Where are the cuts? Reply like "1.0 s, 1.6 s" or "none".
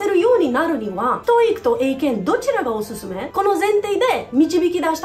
1.2 s, 3.2 s